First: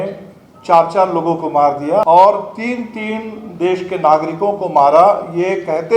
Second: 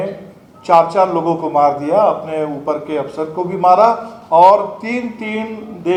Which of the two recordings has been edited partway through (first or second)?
first